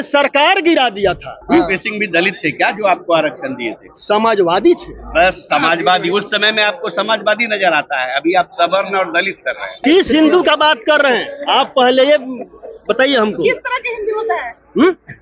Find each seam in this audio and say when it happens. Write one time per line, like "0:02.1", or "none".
0:01.3
0:09.8